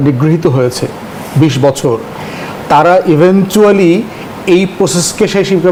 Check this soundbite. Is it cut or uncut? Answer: uncut